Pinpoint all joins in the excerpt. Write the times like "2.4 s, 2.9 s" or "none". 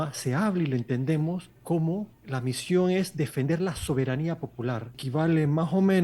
1.5 s, 2.2 s, 4.9 s